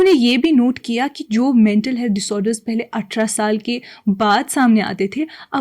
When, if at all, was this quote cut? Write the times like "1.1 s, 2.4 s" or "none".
none